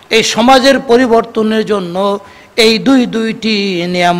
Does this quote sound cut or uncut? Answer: uncut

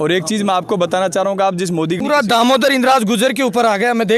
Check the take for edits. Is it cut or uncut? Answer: cut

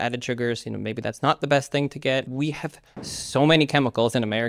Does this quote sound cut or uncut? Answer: cut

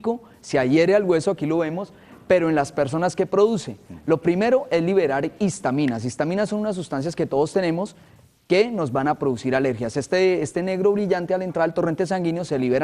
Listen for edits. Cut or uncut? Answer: uncut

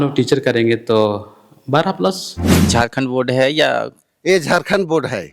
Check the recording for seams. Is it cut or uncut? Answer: cut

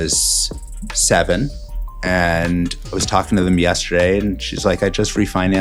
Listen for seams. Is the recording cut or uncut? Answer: uncut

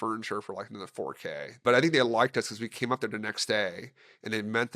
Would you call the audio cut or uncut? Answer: cut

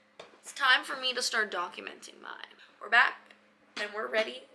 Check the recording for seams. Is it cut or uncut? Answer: cut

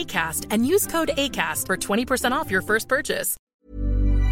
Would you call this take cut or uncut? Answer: cut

